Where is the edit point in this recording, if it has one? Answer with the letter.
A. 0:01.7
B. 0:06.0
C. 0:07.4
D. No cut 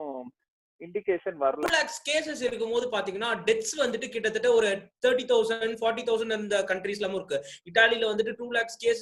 A